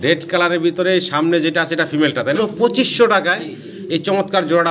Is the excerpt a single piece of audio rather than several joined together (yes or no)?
no